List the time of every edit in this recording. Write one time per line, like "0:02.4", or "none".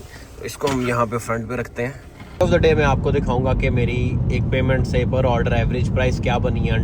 0:02.4